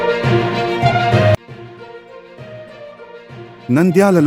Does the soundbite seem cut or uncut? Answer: uncut